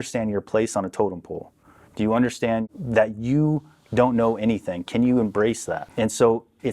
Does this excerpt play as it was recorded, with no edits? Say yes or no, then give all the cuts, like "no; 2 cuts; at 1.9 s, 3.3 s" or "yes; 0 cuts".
no; 2 cuts; at 2.6 s, 5.8 s